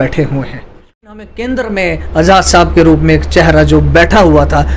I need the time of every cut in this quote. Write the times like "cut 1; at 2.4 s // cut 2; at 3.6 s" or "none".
cut 1; at 1.0 s